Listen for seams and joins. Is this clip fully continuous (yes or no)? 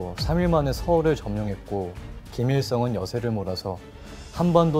yes